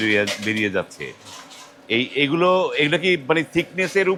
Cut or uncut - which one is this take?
uncut